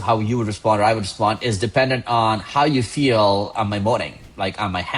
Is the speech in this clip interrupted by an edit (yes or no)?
no